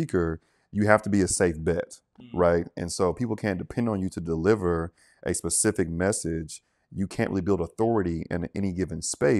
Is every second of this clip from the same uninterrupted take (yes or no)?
yes